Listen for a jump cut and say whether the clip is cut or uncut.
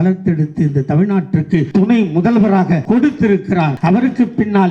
cut